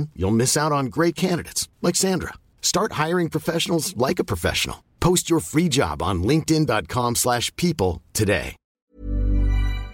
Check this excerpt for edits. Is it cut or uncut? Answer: cut